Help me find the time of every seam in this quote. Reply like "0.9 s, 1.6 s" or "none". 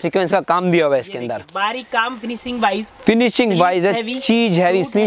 none